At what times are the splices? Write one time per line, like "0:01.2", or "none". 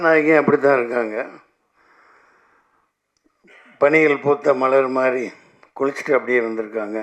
none